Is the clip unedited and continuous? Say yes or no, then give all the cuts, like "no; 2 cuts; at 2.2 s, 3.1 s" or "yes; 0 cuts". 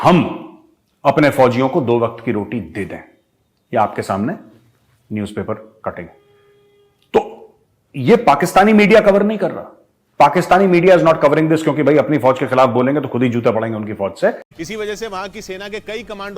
no; 1 cut; at 14.5 s